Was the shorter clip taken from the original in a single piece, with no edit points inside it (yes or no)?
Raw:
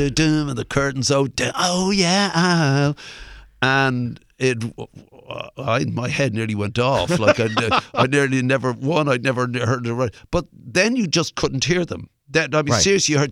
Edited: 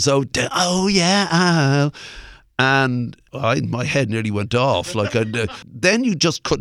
no